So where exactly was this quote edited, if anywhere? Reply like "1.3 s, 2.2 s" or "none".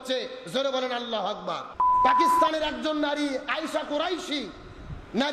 1.7 s